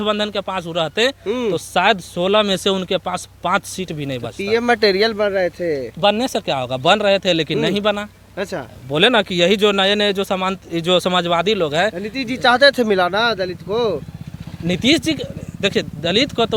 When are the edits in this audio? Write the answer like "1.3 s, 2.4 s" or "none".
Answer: none